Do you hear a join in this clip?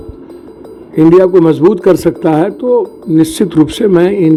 no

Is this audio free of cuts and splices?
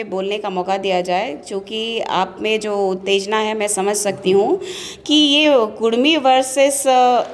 yes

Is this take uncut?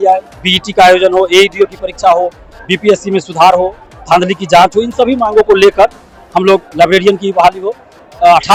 yes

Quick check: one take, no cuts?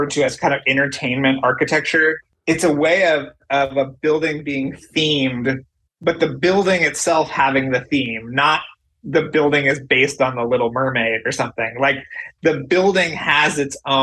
no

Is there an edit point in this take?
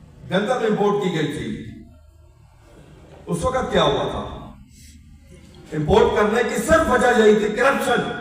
no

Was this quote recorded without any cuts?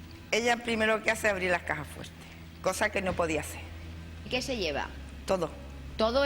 no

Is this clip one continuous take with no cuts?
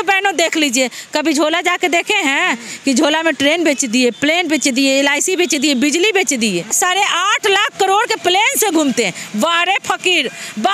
yes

